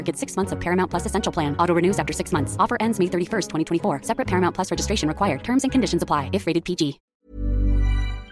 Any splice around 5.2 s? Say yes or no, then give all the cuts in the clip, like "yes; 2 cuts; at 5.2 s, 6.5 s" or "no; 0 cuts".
no; 1 cut; at 7.0 s